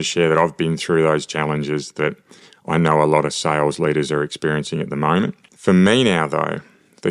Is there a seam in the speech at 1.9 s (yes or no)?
no